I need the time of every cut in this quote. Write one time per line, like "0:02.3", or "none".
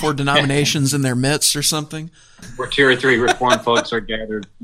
0:02.5